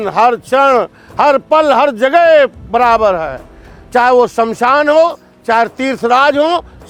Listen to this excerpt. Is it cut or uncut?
uncut